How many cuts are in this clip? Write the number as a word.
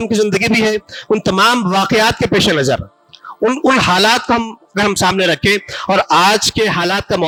zero